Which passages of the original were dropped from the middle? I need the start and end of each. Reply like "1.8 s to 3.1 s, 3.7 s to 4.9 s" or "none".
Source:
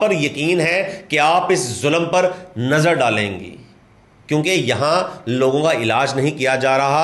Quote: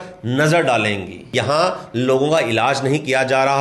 3.6 s to 4.6 s